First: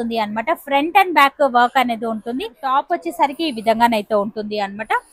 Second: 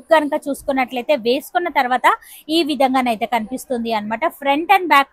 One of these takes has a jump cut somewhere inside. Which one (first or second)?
first